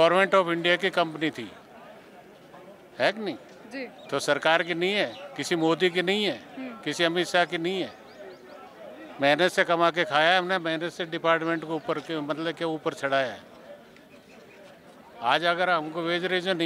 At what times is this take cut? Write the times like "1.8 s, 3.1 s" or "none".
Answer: none